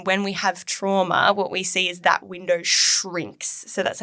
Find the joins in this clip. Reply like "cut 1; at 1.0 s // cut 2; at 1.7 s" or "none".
none